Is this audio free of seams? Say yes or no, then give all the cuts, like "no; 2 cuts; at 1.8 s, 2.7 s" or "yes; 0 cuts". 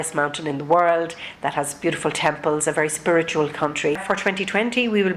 no; 1 cut; at 4.0 s